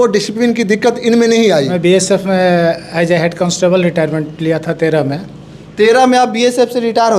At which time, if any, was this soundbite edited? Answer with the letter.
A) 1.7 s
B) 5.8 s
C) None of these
A